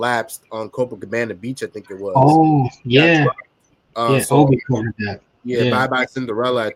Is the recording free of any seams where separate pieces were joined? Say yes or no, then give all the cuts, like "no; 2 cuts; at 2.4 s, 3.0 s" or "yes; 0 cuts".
yes; 0 cuts